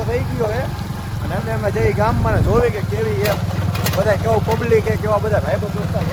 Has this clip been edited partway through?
no; 0 cuts

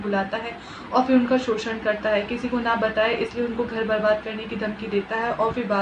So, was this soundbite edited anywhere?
no; 0 cuts

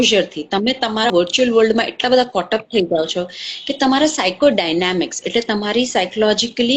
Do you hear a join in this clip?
yes; 1 cut; at 1.1 s

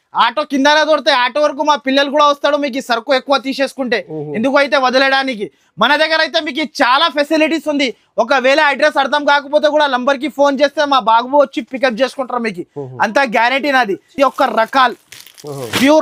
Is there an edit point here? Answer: no; 0 cuts

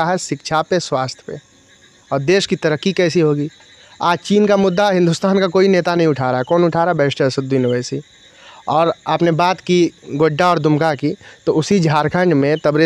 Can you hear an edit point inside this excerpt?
no; 0 cuts

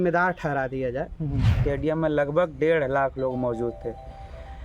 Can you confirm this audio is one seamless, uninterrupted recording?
no; 1 cut; at 1.5 s

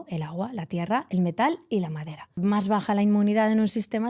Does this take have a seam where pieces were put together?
yes; 1 cut; at 2.4 s

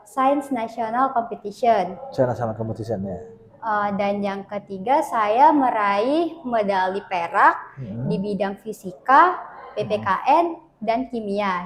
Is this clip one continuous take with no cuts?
yes; 0 cuts

